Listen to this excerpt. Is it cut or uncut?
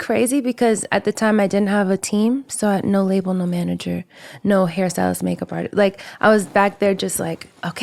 uncut